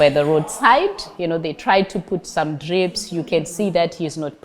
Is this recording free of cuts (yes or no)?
no